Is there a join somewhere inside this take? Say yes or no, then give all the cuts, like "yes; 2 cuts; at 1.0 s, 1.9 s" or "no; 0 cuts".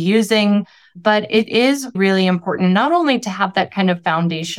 yes; 2 cuts; at 0.9 s, 2.0 s